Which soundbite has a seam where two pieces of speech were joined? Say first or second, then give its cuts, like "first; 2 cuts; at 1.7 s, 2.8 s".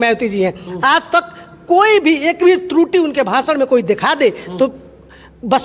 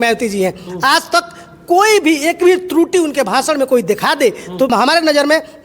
second; 1 cut; at 4.7 s